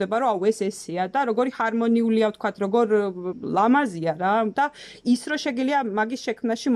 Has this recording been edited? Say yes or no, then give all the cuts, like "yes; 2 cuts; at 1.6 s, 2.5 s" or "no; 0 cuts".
yes; 2 cuts; at 3.4 s, 4.5 s